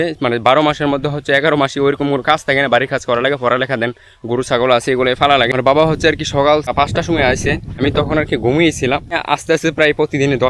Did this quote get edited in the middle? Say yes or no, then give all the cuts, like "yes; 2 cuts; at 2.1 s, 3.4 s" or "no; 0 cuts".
yes; 4 cuts; at 5.6 s, 6.7 s, 7.8 s, 9.2 s